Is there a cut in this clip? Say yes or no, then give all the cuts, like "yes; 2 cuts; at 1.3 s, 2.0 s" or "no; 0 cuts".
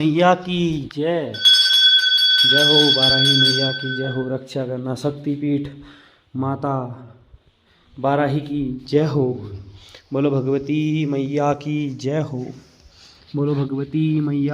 no; 0 cuts